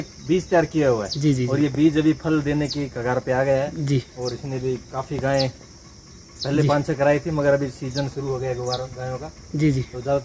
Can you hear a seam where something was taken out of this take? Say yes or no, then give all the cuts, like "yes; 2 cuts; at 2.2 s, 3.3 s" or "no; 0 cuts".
no; 0 cuts